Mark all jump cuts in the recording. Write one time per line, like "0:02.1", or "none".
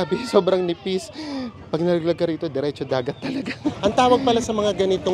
0:03.8